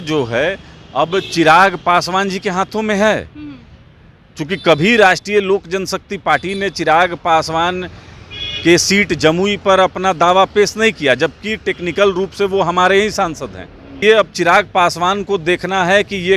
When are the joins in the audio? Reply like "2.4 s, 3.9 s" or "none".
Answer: 14.0 s